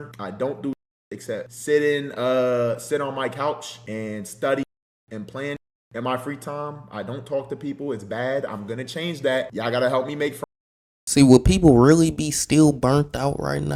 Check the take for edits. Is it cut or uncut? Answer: uncut